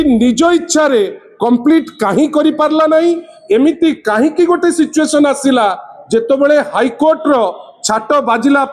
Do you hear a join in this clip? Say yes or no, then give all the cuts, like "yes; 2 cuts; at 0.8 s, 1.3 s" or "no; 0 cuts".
no; 0 cuts